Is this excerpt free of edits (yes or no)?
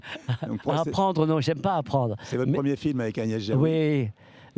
yes